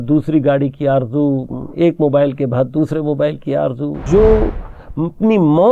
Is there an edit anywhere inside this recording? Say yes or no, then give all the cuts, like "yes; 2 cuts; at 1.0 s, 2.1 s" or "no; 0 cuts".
yes; 1 cut; at 3.9 s